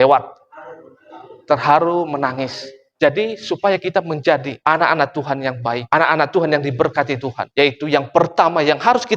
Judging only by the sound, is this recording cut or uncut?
cut